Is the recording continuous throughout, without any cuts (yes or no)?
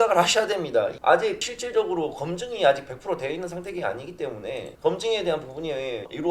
no